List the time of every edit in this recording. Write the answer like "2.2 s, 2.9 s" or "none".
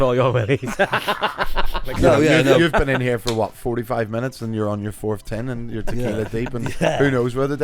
1.9 s